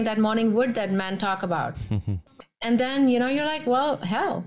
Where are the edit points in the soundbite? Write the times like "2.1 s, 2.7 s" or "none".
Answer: 2.2 s